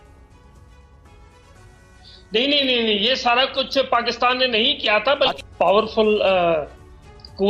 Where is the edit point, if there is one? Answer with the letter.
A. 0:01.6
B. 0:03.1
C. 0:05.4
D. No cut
C